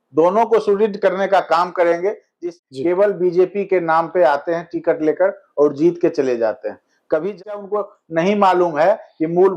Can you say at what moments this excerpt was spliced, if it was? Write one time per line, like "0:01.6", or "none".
0:02.3
0:07.6